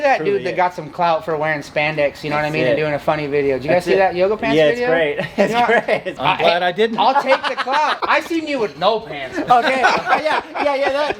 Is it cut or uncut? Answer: cut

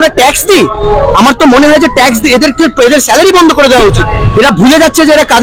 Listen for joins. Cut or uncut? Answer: cut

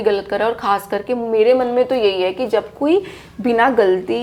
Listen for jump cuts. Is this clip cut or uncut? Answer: uncut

